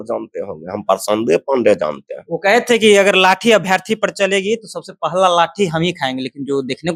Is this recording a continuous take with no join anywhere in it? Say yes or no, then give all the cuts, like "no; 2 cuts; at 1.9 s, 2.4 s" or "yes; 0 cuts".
yes; 0 cuts